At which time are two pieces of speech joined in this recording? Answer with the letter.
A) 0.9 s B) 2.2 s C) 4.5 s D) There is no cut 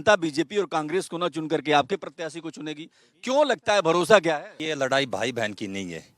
C